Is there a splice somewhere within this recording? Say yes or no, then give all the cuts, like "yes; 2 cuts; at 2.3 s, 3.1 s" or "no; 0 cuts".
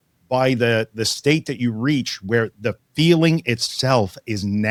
no; 0 cuts